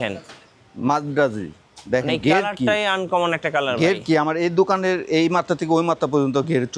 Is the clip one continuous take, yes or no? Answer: yes